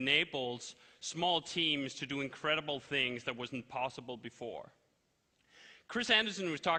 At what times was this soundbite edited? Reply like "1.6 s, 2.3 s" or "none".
none